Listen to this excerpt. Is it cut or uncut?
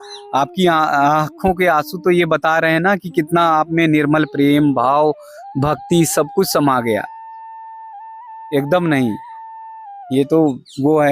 uncut